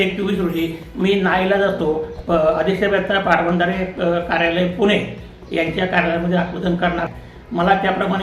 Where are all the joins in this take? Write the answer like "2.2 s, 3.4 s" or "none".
7.1 s